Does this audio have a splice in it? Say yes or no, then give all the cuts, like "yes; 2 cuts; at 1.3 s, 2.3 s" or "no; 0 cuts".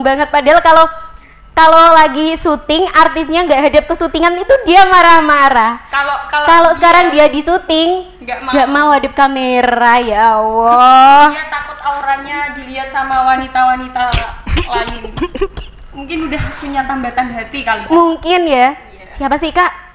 no; 0 cuts